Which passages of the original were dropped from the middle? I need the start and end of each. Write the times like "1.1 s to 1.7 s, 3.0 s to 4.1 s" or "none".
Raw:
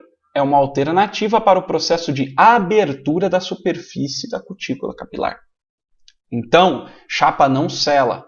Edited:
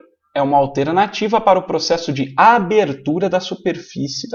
none